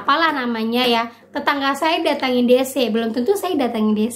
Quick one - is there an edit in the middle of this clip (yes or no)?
no